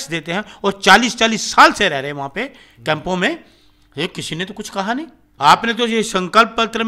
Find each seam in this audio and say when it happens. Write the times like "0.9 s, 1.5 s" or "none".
5.2 s